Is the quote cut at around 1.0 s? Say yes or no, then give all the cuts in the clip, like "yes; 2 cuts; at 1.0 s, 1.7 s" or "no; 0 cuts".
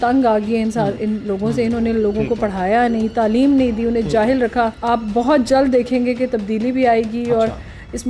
no; 1 cut; at 4.8 s